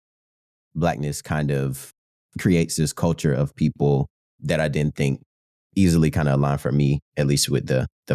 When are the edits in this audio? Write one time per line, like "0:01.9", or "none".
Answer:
0:04.3